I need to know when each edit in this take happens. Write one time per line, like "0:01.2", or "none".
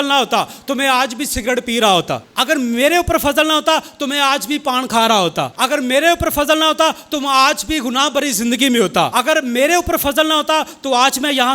0:02.3
0:05.5
0:09.1